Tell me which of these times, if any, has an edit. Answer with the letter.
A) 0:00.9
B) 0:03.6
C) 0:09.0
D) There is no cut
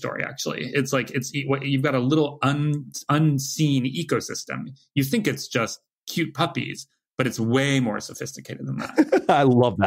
C